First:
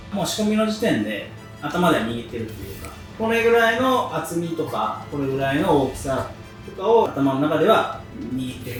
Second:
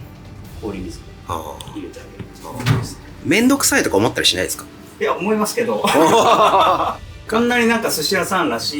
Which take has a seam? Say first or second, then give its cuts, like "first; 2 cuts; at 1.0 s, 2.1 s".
second; 1 cut; at 3.1 s